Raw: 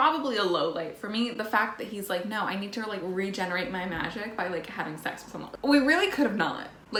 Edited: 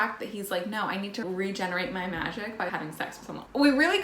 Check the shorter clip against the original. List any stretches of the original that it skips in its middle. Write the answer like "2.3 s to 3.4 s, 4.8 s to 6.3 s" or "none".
2.8 s to 3.0 s, 4.7 s to 5.0 s

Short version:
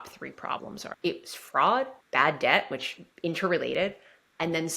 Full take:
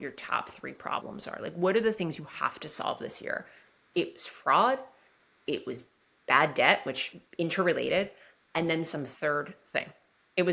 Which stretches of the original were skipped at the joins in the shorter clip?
1.3 s to 3.8 s, 4.9 s to 6.1 s

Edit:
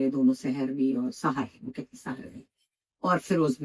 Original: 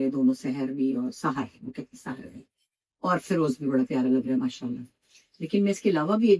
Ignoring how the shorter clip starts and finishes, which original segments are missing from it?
none

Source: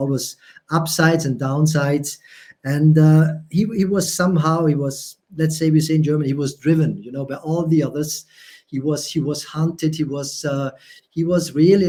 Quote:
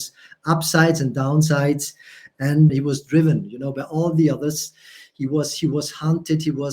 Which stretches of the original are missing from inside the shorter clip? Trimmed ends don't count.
2.9 s to 6.2 s

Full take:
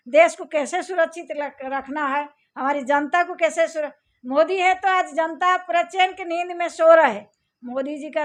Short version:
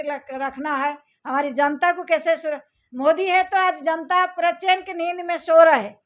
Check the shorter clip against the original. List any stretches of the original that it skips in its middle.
none

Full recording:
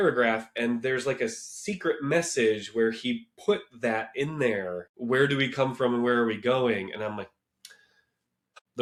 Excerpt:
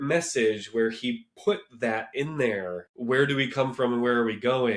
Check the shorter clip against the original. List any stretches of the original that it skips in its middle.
none

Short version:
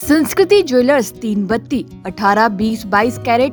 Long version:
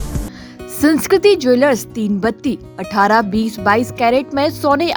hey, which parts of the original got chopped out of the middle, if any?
none

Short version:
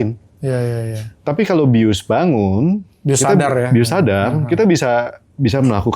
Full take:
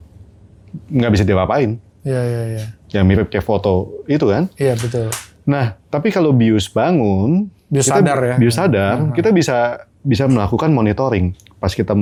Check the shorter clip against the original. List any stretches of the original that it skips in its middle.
2.7 s to 5.8 s

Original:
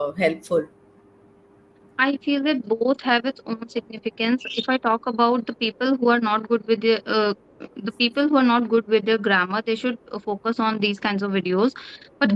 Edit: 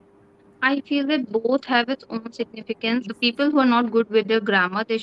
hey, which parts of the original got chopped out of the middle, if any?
4.5 s to 7.9 s

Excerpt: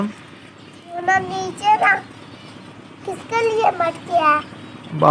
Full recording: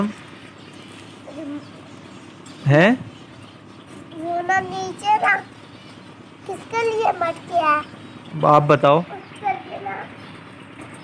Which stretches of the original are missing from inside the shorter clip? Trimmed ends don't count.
1.0 s to 4.4 s

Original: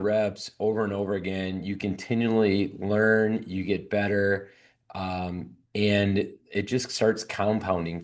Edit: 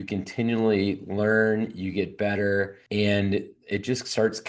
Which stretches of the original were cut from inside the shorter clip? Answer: 4.5 s to 5.6 s

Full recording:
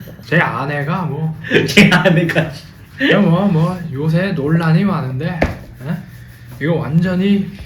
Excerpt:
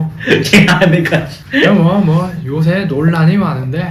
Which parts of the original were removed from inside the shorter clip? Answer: 2.6 s to 2.8 s

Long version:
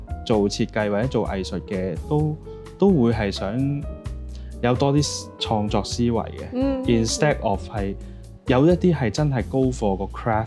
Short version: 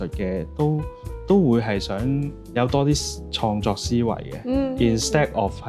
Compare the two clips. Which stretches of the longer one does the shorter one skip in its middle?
3.9 s to 4.4 s

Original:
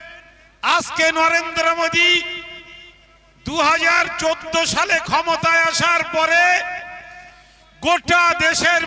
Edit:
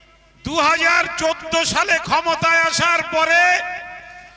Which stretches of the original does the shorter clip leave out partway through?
none

